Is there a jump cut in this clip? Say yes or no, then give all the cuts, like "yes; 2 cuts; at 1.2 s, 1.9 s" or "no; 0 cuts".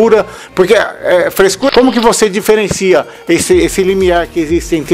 yes; 1 cut; at 1.7 s